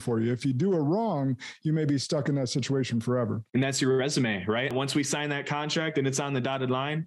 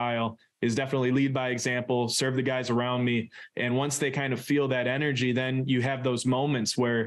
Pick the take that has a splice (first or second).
first